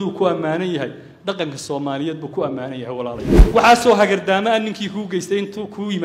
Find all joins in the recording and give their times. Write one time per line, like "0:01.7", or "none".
0:03.3